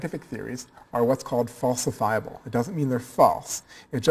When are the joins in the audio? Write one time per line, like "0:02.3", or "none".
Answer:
0:03.0

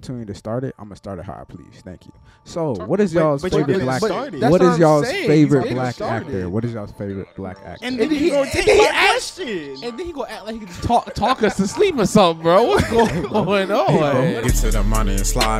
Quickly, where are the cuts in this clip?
0:14.4

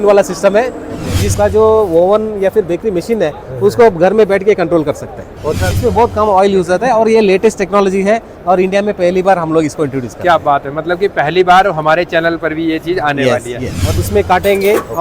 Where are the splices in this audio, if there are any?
0:01.3
0:05.7
0:13.8

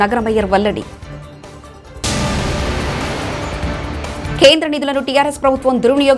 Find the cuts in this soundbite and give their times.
none

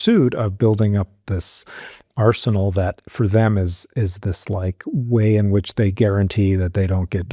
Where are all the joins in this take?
none

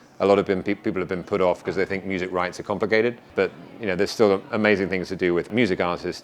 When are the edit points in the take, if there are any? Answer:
0:03.2
0:05.5

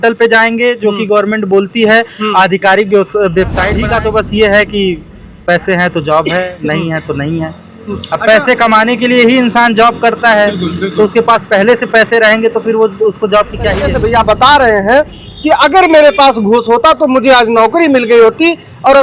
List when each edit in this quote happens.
0:03.8
0:13.9

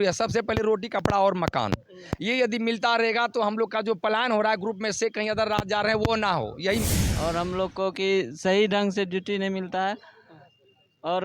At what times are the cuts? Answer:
0:06.8

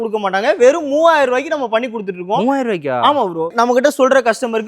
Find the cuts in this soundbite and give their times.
0:03.5

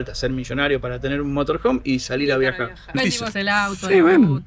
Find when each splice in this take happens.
0:02.9

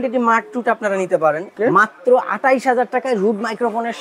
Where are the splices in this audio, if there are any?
0:01.5

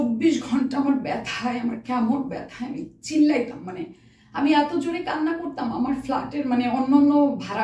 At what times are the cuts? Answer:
none

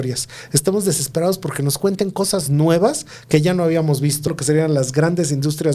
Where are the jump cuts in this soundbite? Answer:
0:04.4

